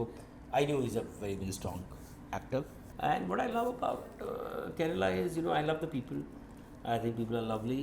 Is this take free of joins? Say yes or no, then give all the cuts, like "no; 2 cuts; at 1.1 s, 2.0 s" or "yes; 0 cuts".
no; 1 cut; at 2.9 s